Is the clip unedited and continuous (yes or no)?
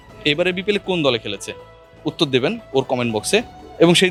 yes